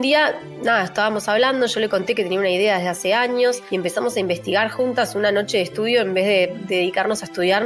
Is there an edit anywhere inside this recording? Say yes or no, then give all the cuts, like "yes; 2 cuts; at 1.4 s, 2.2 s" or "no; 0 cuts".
yes; 2 cuts; at 3.6 s, 6.6 s